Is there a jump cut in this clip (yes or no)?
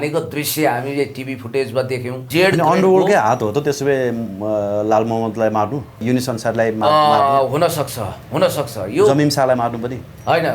yes